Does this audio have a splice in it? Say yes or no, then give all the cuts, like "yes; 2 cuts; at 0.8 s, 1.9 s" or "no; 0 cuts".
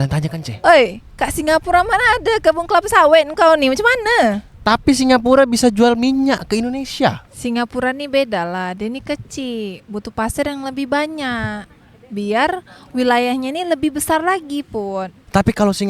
yes; 1 cut; at 7.2 s